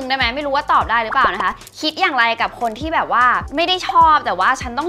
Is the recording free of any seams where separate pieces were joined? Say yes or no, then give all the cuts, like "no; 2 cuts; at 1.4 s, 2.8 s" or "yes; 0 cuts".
yes; 0 cuts